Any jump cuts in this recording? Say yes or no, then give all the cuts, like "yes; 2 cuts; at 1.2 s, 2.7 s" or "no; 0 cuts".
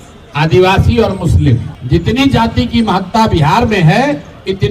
yes; 1 cut; at 1.7 s